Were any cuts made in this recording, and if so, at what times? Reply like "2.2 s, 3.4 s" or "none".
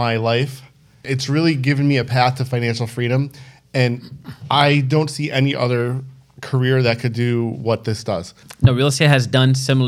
1.1 s, 8.4 s